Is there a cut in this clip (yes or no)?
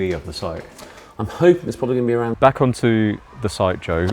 yes